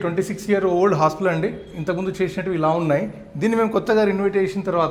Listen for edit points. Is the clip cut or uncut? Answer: uncut